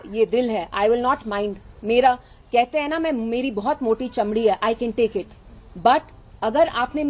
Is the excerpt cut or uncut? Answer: uncut